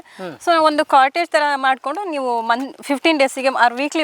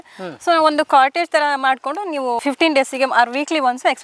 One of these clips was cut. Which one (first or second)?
second